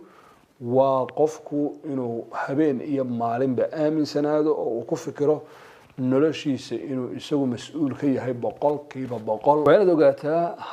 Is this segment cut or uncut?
cut